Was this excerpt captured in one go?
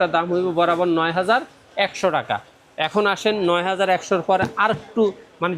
yes; 0 cuts

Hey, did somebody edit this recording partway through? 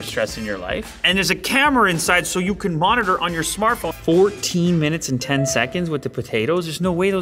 yes; 2 cuts; at 1.0 s, 3.9 s

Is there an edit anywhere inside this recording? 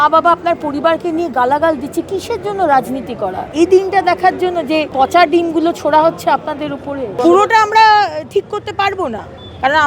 yes; 3 cuts; at 3.4 s, 4.9 s, 7.2 s

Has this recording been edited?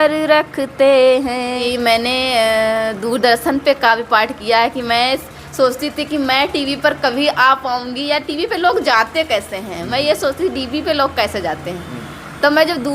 yes; 1 cut; at 1.6 s

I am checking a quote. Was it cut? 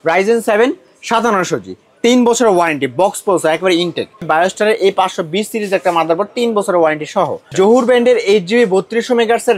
yes; 2 cuts; at 4.3 s, 7.4 s

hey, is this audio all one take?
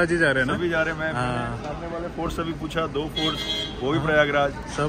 yes; 0 cuts

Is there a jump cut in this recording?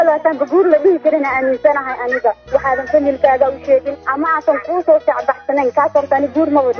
yes; 1 cut; at 4.0 s

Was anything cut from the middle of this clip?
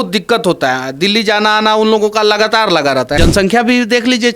yes; 1 cut; at 3.1 s

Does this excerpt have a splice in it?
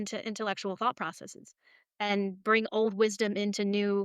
no; 0 cuts

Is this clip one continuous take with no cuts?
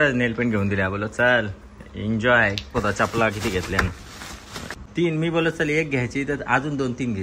no; 2 cuts; at 2.7 s, 4.7 s

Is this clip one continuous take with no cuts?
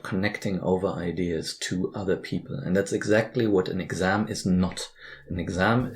yes; 0 cuts

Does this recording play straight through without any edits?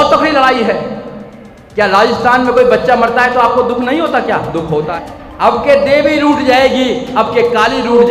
no; 1 cut; at 4.9 s

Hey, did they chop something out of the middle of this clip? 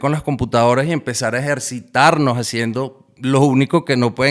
no; 0 cuts

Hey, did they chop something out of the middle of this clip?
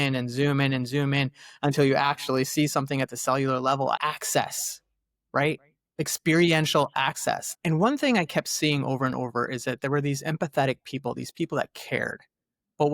yes; 2 cuts; at 4.0 s, 7.5 s

